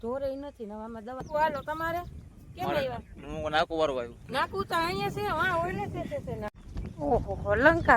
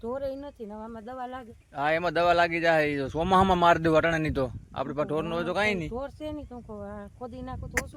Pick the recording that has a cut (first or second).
first